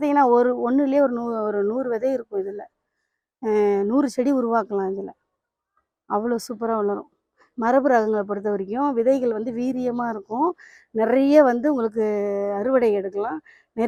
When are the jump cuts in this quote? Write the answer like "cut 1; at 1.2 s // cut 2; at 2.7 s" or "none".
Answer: none